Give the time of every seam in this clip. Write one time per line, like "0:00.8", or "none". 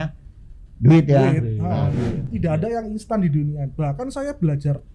0:02.2